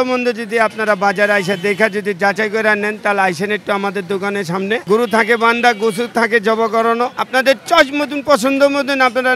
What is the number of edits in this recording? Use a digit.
2